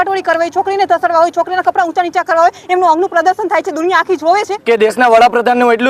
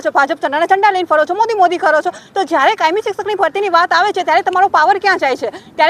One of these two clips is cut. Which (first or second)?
first